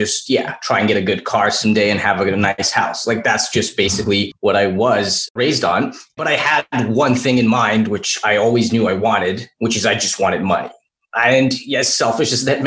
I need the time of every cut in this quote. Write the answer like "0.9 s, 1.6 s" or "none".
2.6 s, 4.3 s, 5.3 s